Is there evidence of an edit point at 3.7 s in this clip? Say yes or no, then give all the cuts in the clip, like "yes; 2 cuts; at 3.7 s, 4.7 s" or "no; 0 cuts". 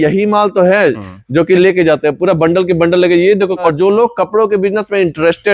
yes; 1 cut; at 3.7 s